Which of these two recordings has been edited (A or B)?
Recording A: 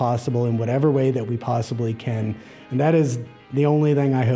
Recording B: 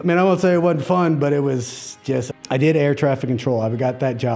B